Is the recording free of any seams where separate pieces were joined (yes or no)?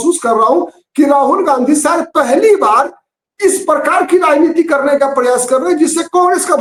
yes